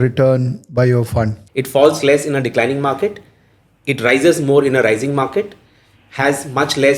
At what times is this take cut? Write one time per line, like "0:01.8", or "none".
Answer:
0:01.4